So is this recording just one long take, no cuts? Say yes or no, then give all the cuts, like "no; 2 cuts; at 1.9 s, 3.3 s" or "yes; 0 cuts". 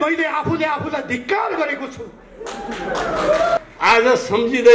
no; 1 cut; at 3.6 s